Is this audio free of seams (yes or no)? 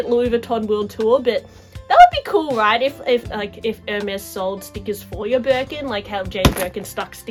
yes